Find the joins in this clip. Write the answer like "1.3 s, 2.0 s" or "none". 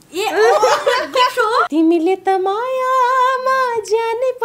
1.7 s